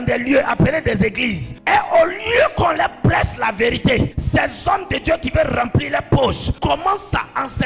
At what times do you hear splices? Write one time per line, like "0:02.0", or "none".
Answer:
0:01.5
0:04.2
0:06.5